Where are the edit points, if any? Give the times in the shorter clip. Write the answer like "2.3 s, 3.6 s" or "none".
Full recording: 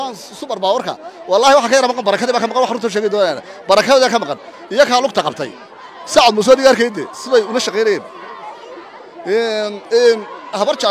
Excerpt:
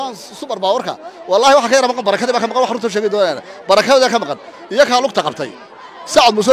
none